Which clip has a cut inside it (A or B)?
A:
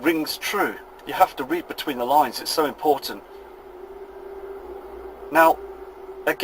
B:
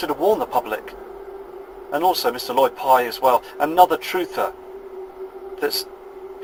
A